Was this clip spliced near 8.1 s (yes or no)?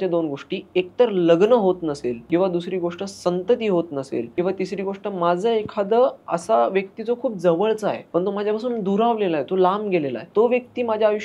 yes